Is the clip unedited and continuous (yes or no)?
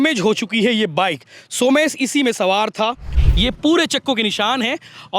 no